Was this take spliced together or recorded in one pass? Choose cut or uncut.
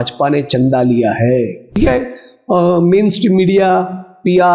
cut